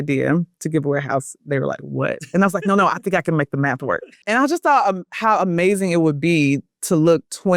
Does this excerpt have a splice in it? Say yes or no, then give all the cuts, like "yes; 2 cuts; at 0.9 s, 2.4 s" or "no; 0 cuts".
no; 0 cuts